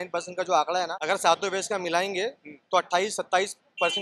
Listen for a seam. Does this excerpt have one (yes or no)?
yes